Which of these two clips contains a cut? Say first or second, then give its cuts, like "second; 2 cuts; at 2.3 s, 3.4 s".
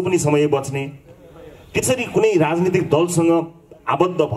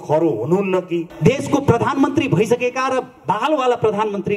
second; 1 cut; at 1.1 s